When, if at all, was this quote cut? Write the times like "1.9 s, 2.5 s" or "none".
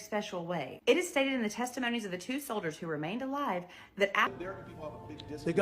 4.3 s